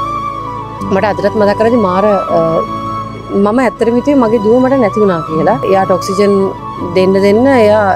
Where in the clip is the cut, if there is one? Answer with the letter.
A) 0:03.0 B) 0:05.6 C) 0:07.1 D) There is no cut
B